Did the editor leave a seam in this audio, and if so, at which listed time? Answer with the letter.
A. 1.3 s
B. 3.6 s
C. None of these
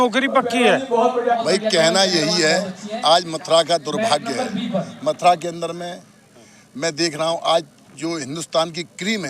A